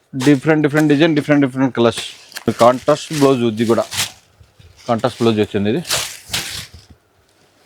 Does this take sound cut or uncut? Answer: cut